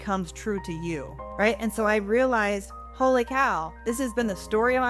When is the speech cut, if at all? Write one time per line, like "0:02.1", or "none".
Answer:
0:01.2